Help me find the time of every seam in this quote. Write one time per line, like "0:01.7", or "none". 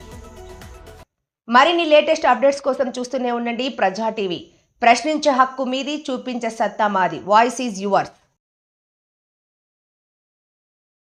none